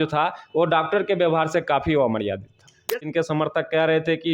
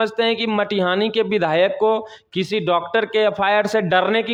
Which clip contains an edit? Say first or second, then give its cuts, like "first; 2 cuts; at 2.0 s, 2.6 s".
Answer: first; 1 cut; at 3.0 s